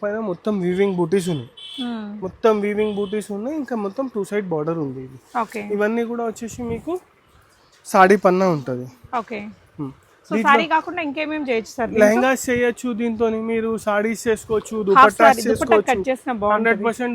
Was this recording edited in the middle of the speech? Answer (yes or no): no